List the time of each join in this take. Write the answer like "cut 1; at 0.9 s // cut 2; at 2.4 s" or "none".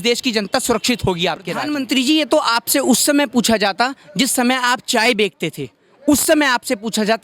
cut 1; at 1.7 s